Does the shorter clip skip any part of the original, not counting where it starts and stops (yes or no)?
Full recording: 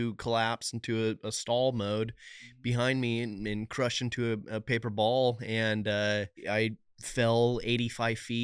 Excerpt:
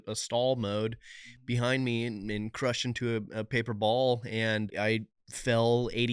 yes